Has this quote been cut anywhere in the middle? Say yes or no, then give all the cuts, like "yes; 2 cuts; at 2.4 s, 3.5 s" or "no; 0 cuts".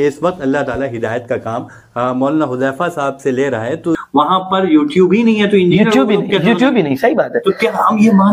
yes; 1 cut; at 4.0 s